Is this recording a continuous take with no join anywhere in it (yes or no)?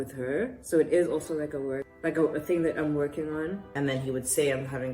no